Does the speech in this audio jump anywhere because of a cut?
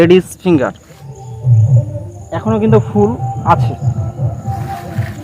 no; 0 cuts

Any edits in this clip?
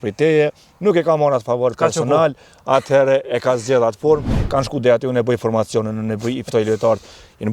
yes; 1 cut; at 4.3 s

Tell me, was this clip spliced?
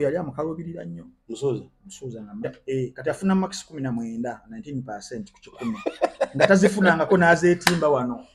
yes; 1 cut; at 2.5 s

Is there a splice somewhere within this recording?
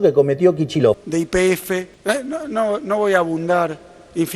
yes; 2 cuts; at 1.0 s, 1.9 s

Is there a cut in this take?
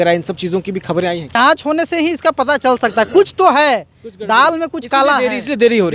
yes; 1 cut; at 1.4 s

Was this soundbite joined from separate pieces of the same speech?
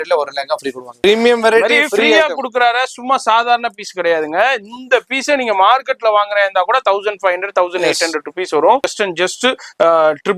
yes; 2 cuts; at 0.9 s, 8.9 s

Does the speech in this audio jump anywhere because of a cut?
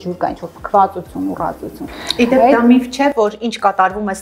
no; 0 cuts

